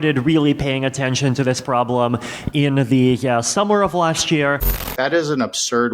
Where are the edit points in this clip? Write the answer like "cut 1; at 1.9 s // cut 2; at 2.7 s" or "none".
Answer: cut 1; at 4.6 s